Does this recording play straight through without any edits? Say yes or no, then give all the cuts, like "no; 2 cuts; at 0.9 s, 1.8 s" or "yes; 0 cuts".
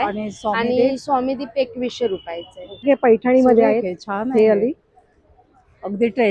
no; 1 cut; at 2.8 s